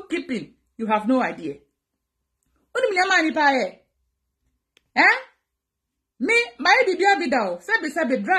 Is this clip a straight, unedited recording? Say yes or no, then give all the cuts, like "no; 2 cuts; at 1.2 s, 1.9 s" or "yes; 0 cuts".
yes; 0 cuts